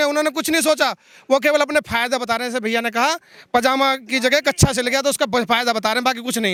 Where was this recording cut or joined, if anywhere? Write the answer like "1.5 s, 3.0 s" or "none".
none